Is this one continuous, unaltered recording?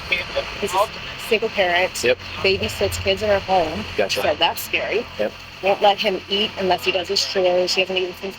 no; 2 cuts; at 2.3 s, 5.5 s

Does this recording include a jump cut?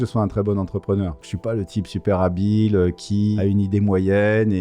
yes; 2 cuts; at 1.2 s, 3.4 s

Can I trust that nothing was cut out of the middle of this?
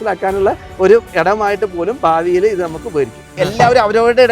no; 1 cut; at 3.2 s

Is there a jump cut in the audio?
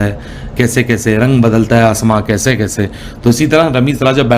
no; 0 cuts

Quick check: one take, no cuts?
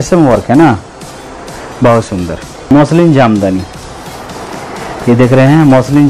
no; 1 cut; at 2.5 s

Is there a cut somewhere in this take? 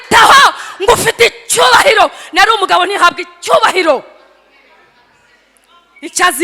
no; 0 cuts

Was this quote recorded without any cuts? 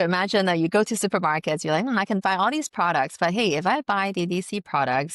yes; 0 cuts

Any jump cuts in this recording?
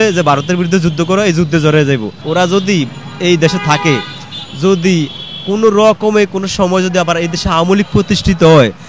yes; 1 cut; at 2.1 s

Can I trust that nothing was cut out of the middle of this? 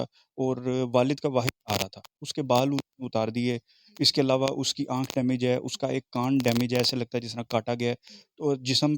no; 1 cut; at 2.3 s

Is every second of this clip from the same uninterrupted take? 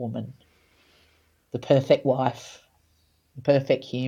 yes; 0 cuts

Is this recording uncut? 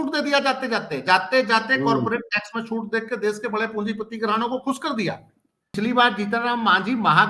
no; 1 cut; at 5.7 s

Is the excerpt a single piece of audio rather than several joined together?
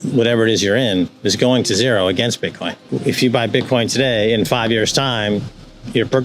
no; 1 cut; at 2.9 s

